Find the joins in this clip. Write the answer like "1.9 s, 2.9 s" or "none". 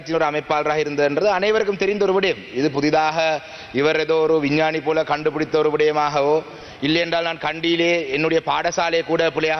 none

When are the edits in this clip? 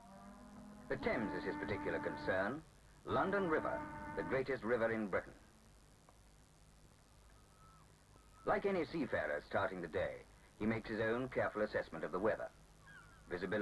8.6 s

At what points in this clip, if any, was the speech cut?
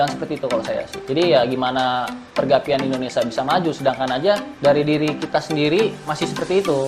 0.9 s, 2.2 s, 4.5 s, 6.0 s

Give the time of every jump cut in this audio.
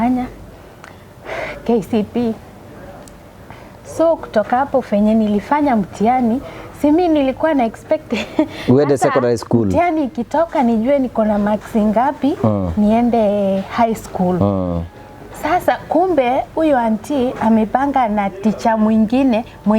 none

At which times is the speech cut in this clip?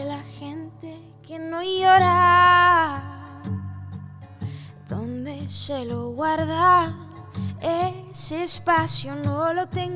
none

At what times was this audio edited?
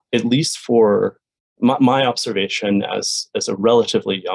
none

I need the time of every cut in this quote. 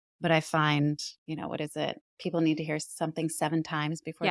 1.1 s

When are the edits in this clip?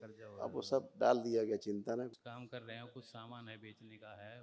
2.1 s

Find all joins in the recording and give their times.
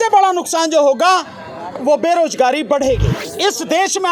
3.2 s

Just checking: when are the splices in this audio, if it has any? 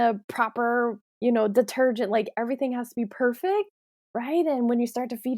1.1 s

